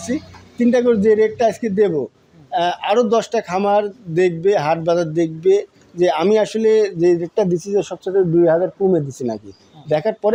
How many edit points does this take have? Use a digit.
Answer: 0